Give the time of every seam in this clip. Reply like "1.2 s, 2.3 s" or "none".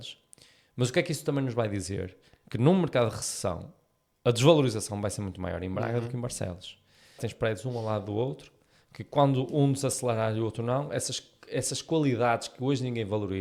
7.2 s